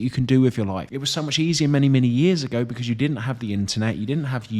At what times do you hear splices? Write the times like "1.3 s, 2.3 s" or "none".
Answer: 0.9 s